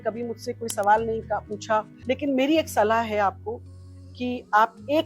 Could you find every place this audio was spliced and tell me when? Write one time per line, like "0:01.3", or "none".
0:01.9